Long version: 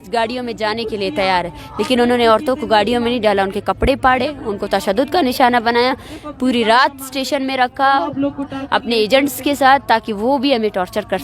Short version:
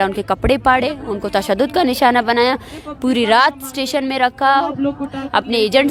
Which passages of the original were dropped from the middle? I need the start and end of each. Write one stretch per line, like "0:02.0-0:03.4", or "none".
none